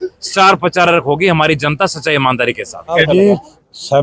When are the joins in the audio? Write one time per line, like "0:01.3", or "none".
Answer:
0:02.9